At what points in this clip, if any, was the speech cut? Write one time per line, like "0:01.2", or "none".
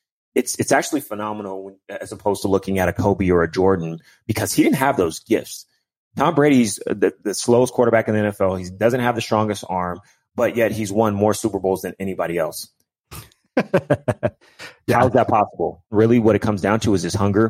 0:15.9